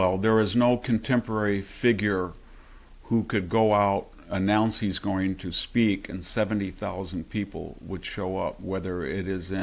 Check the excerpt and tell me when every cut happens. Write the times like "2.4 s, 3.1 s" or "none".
none